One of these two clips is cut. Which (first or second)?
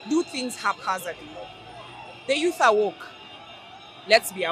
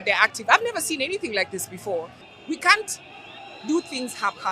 second